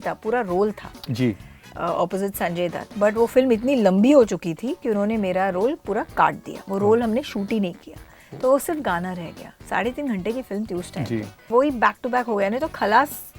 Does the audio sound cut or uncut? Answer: uncut